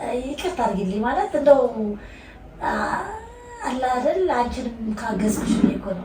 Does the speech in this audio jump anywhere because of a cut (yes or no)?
no